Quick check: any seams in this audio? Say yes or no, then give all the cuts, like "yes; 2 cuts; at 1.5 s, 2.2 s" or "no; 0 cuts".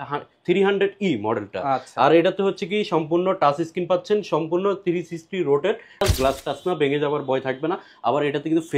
yes; 1 cut; at 6.0 s